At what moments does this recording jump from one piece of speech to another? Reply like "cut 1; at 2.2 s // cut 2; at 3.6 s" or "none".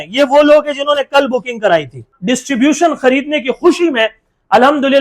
cut 1; at 2.1 s